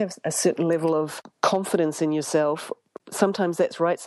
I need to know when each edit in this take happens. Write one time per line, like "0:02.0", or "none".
0:01.2
0:03.0